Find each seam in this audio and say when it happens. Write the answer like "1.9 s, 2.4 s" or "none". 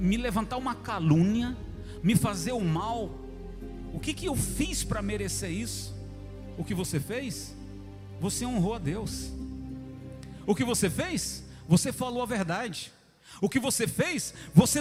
none